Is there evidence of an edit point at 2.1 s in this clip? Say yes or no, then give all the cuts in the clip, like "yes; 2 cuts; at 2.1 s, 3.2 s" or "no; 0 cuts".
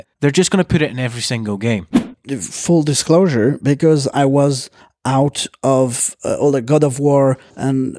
yes; 1 cut; at 2.1 s